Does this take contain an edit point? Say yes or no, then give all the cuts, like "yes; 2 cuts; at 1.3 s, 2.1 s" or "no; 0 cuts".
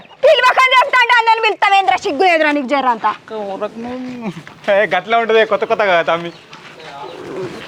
no; 0 cuts